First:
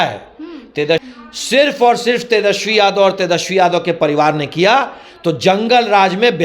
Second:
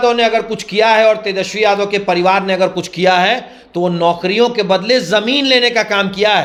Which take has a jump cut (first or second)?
first